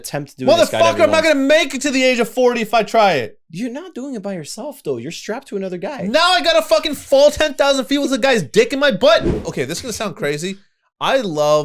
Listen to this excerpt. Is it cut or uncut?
cut